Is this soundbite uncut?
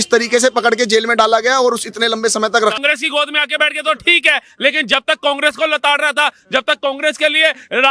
no; 1 cut; at 2.8 s

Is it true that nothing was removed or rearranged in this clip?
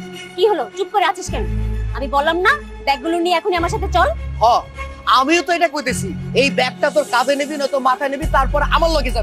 no; 1 cut; at 4.2 s

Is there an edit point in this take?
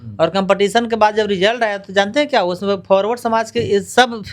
no; 0 cuts

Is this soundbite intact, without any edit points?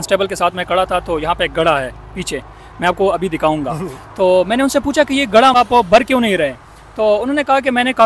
no; 1 cut; at 5.5 s

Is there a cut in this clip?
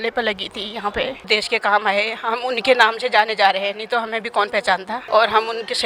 yes; 2 cuts; at 1.3 s, 5.0 s

